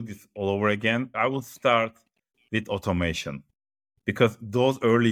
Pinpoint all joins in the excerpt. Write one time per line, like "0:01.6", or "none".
0:01.1